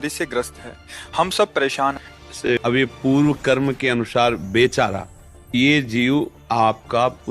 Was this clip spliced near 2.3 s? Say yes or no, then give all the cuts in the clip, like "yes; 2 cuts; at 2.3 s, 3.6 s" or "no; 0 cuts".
yes; 2 cuts; at 2.3 s, 5.5 s